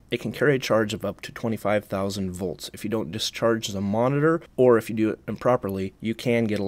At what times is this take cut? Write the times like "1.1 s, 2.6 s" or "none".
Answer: 4.5 s